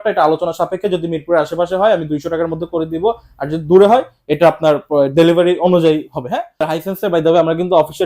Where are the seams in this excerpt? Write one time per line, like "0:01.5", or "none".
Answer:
0:06.7